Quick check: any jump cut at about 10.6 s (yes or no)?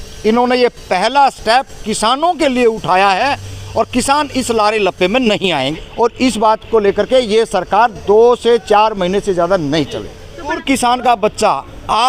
yes